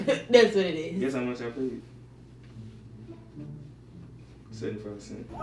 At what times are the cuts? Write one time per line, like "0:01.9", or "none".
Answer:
none